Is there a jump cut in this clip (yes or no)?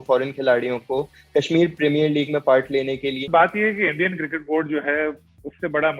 yes